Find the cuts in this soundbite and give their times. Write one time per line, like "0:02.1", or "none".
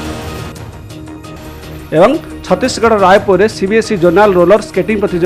none